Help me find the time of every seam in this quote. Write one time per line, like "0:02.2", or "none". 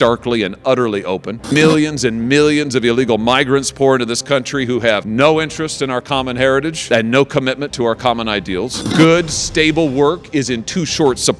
0:01.5